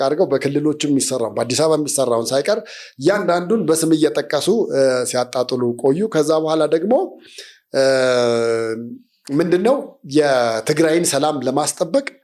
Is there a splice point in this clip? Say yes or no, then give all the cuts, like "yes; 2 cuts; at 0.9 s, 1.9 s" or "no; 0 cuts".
no; 0 cuts